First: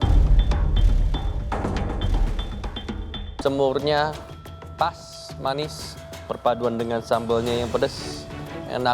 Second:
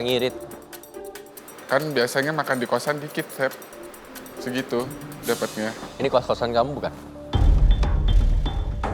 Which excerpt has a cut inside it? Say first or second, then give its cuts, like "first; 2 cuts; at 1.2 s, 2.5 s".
first; 1 cut; at 3.4 s